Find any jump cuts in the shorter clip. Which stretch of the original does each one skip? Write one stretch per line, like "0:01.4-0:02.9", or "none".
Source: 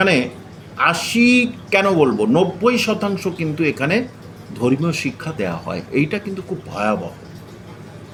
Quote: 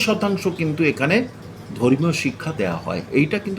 none